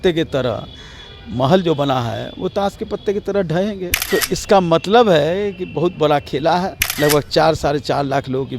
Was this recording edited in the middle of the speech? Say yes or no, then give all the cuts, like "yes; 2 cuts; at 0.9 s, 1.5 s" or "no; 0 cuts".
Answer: yes; 2 cuts; at 4.0 s, 6.8 s